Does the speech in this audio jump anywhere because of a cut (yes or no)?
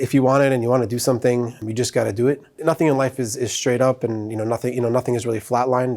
yes